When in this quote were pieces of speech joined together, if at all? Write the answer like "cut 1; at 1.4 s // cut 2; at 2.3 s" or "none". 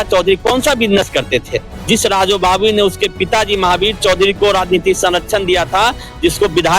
cut 1; at 1.7 s